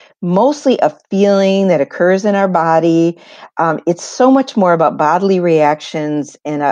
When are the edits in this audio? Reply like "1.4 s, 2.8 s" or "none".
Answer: none